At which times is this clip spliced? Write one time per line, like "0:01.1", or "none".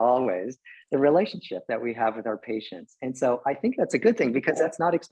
none